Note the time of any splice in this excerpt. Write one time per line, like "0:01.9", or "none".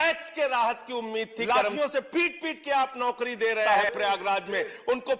0:01.4
0:03.7